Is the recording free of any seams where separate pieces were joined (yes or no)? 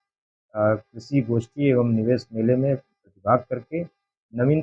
yes